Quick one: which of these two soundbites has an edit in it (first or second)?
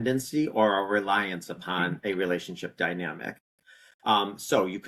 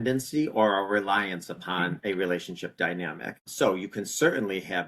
second